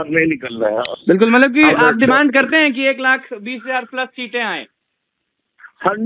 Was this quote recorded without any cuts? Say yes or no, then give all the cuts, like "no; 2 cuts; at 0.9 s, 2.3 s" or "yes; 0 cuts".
no; 1 cut; at 0.9 s